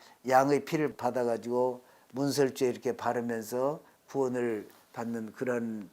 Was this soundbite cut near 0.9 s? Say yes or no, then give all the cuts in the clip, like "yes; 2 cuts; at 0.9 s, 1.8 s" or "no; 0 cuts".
yes; 1 cut; at 0.9 s